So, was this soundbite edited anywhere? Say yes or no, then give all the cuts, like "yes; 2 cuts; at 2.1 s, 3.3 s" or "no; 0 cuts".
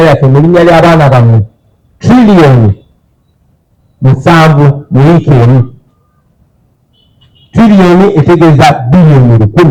no; 0 cuts